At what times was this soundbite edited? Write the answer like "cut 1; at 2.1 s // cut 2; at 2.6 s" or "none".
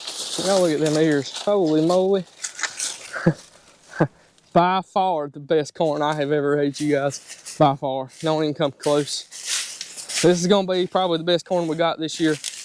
none